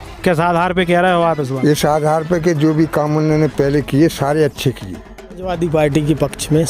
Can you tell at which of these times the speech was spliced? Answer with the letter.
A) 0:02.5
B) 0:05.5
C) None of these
B